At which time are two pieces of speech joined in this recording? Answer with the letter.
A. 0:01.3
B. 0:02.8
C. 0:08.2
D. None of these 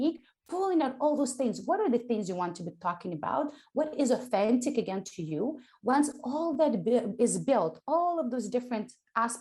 D